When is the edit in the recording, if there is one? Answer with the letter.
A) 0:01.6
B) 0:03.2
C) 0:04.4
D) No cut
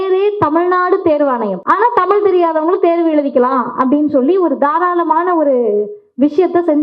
A